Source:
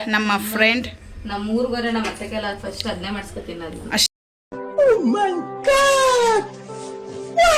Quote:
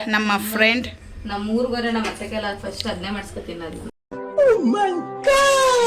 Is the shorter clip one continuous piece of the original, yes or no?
no